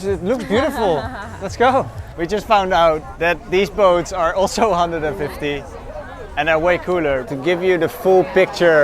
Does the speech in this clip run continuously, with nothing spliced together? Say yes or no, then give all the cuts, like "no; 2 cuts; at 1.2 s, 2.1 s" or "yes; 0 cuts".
no; 3 cuts; at 2.0 s, 3.1 s, 7.3 s